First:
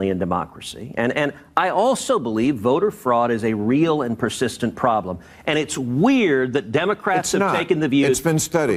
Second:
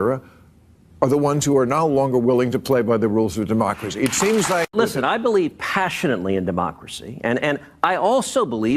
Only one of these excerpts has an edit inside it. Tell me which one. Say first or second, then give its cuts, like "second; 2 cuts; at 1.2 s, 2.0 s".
second; 1 cut; at 4.7 s